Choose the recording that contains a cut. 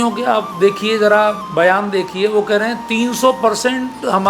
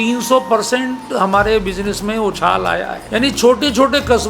second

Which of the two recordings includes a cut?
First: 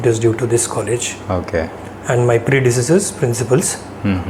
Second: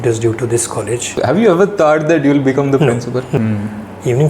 second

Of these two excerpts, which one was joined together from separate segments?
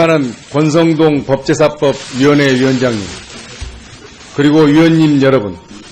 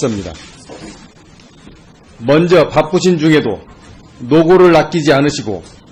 first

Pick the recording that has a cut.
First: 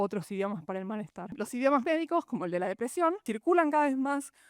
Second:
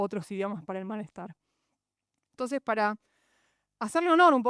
first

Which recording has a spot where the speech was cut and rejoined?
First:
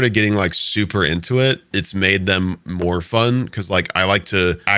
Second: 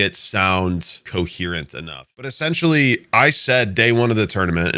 second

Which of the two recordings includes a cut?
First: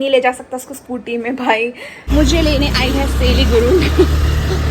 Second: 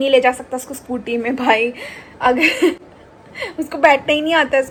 first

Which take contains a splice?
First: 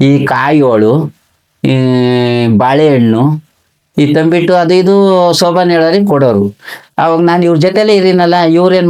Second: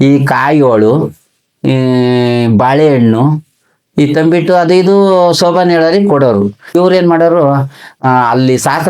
second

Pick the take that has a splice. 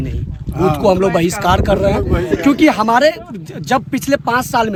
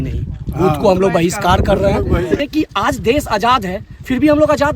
second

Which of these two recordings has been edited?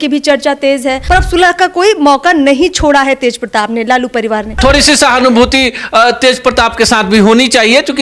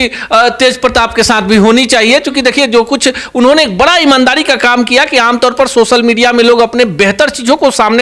first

